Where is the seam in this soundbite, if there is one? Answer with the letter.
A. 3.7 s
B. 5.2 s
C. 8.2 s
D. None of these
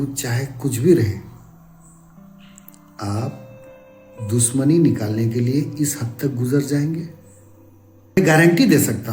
C